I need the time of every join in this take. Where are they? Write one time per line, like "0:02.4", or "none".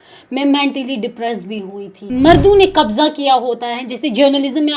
0:02.0